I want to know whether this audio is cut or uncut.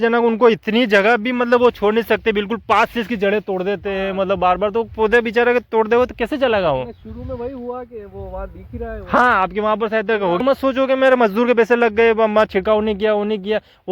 cut